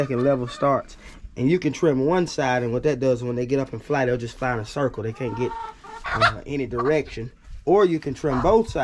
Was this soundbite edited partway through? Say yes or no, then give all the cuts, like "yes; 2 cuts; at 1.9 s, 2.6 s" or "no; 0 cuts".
no; 0 cuts